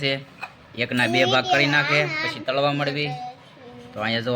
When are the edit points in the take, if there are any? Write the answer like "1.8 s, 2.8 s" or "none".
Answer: none